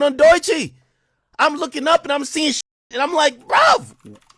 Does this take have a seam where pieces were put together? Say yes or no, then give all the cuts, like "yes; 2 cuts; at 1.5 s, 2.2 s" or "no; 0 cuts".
no; 0 cuts